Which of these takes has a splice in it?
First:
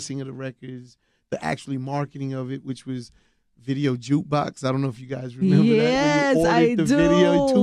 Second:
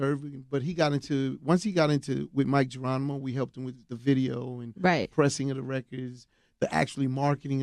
second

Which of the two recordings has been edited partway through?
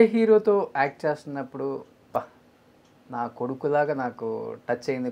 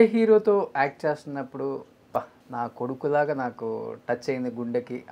second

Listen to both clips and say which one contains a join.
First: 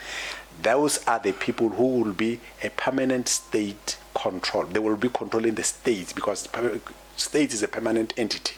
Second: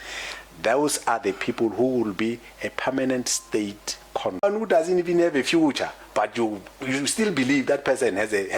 second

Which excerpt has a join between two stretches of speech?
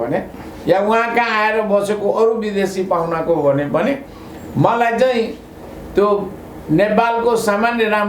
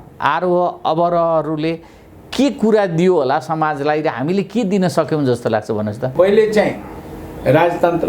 second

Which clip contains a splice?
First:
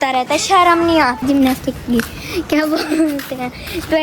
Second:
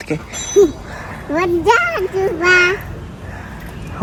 first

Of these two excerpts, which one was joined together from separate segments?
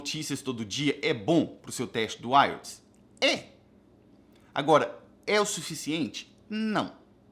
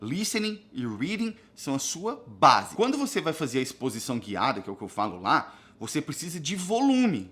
second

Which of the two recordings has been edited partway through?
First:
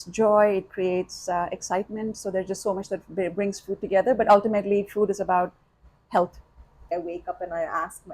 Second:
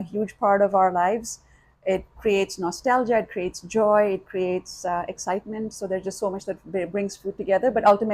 first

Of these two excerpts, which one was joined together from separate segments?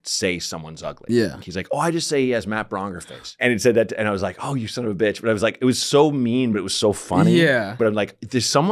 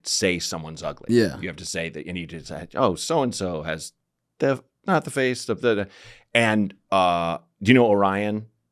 first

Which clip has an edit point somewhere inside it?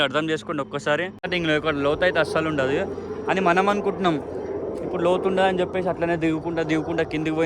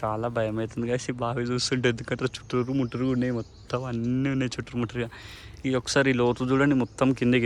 first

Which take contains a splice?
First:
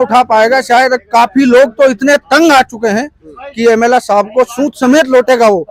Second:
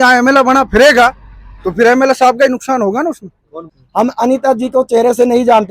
second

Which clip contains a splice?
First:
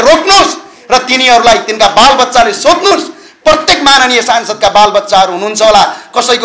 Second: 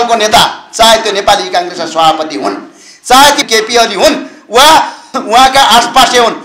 second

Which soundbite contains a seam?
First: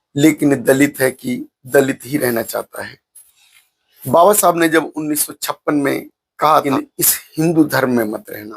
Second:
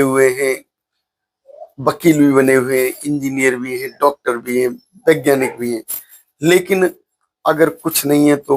first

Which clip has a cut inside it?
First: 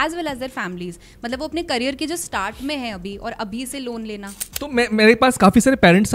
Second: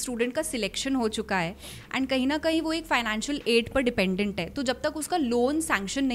first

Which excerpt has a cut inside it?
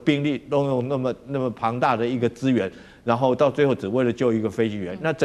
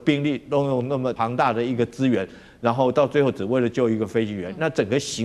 second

